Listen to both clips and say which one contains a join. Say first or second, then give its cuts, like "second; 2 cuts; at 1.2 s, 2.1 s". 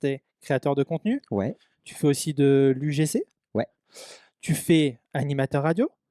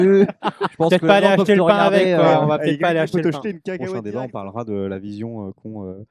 second; 1 cut; at 3.7 s